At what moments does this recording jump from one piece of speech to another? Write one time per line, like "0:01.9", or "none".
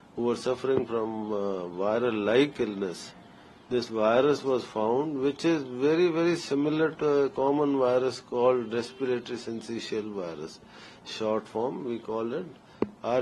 none